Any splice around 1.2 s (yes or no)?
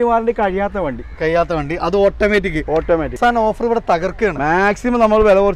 no